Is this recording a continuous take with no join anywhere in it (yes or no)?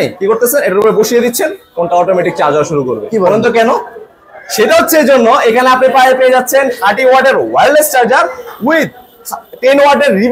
yes